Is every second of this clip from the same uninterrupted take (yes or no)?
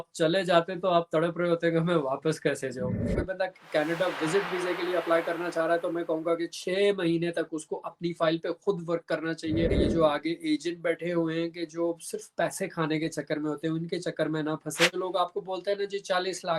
no